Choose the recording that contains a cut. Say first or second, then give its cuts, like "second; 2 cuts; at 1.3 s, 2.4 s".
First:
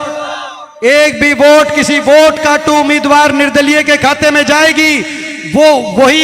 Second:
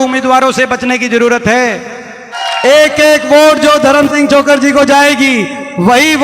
second; 1 cut; at 2.2 s